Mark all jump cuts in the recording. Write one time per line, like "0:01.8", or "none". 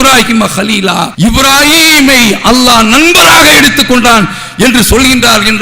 0:01.1